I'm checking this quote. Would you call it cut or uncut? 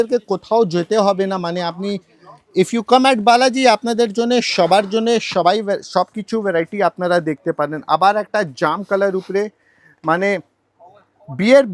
uncut